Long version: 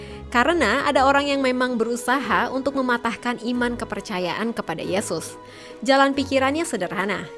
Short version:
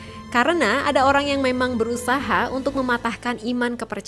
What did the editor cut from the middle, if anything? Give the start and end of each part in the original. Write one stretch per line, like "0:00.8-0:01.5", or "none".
none